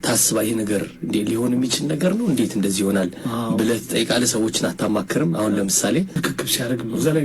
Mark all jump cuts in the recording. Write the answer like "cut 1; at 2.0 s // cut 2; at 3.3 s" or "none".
cut 1; at 6.2 s